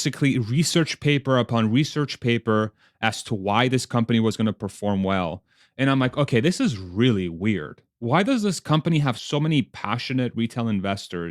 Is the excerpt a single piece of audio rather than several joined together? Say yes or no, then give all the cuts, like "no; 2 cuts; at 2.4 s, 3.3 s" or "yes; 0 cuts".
no; 1 cut; at 9.2 s